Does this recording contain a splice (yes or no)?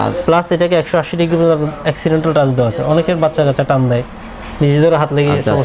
no